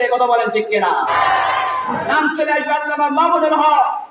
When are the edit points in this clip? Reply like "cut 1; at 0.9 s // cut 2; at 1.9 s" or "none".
cut 1; at 1.0 s // cut 2; at 2.1 s

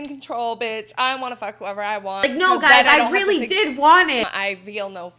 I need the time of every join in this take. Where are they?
cut 1; at 2.2 s // cut 2; at 4.2 s

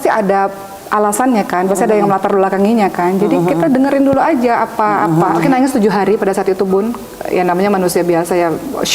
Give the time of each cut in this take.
cut 1; at 5.4 s

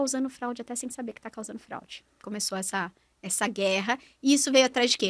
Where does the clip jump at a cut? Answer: cut 1; at 2.2 s

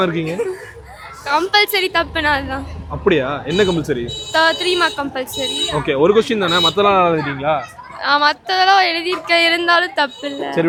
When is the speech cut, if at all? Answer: none

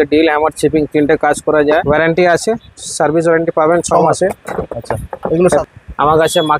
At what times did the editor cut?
cut 1; at 1.7 s // cut 2; at 5.4 s

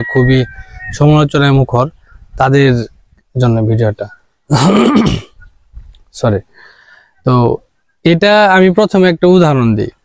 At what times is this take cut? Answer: none

